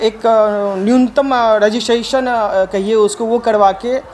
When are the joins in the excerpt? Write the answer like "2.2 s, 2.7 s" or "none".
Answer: none